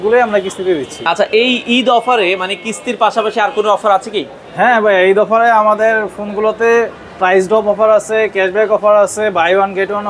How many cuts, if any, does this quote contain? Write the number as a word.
zero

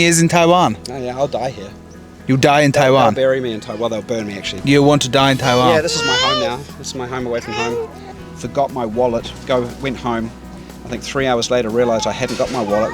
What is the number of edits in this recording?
two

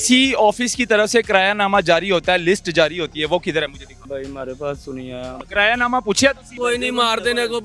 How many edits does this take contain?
three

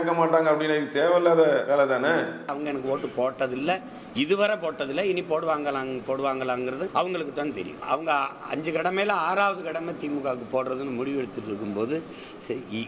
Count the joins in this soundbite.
three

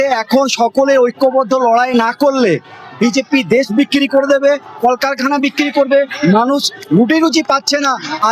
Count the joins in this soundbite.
zero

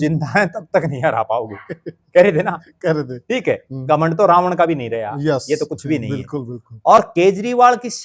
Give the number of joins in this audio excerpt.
zero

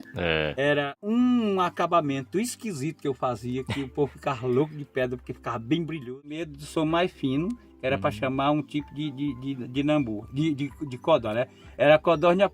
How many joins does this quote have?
two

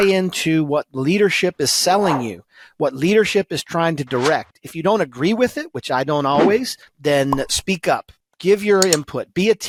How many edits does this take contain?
zero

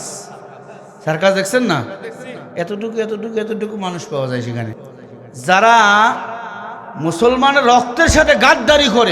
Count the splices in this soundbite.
one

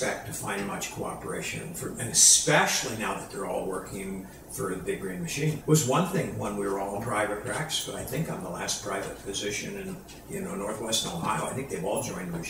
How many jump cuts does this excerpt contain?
one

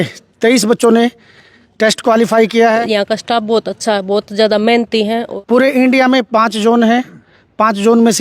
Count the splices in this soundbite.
two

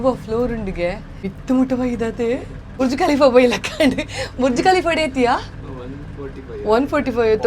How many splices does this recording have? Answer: two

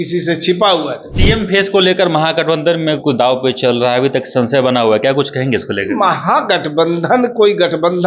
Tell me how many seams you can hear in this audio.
one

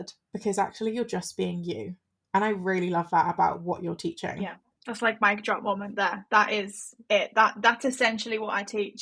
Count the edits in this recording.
one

